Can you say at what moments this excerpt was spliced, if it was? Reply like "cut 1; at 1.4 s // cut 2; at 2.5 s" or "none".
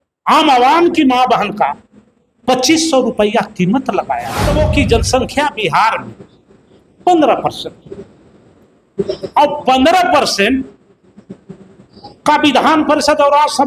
cut 1; at 4.5 s